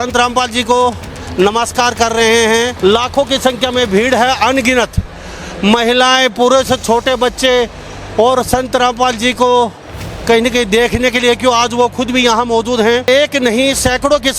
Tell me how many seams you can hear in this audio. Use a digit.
2